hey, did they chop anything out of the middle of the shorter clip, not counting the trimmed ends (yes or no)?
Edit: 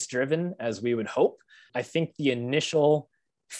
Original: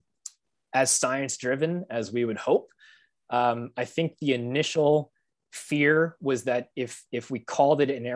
yes